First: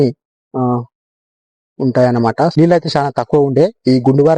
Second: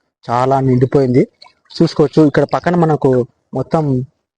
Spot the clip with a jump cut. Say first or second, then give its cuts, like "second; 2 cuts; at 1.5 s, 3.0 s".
first; 1 cut; at 2.5 s